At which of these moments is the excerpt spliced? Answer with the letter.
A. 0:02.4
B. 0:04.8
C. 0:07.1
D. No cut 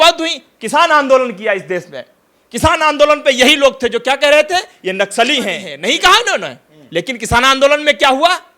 D